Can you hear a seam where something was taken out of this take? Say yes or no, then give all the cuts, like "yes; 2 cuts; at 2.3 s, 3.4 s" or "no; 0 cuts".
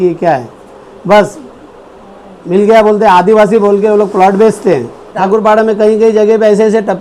yes; 1 cut; at 5.2 s